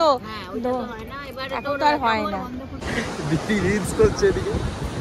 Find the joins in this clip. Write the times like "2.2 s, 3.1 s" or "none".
2.7 s